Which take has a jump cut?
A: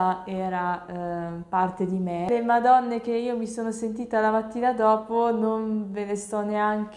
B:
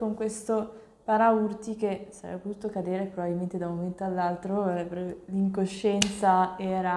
A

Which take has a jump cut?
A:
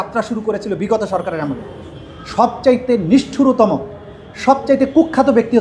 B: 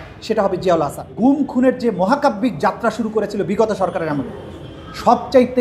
B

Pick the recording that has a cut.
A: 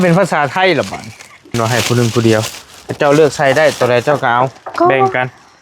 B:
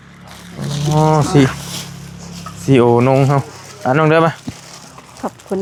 A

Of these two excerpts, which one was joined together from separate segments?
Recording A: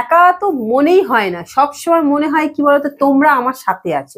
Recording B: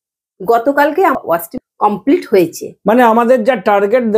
B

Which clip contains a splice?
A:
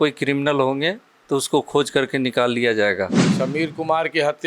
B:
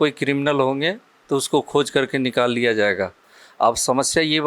A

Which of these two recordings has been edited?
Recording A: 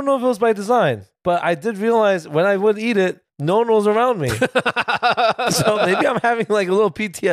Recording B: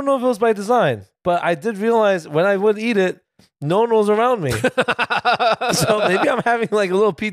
A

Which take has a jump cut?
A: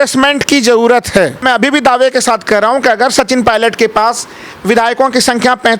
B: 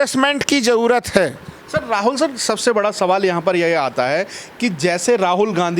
A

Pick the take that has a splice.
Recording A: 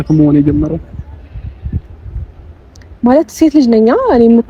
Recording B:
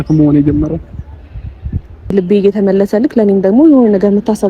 B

